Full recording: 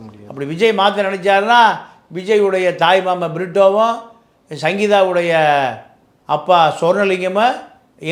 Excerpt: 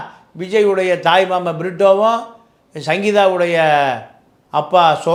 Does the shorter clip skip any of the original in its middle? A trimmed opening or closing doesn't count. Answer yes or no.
no